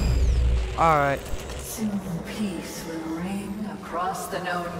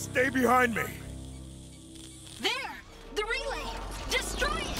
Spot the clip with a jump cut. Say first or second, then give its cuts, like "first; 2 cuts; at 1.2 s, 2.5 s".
second; 2 cuts; at 0.9 s, 2.3 s